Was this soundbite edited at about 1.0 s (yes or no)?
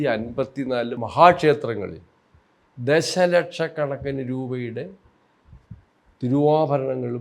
yes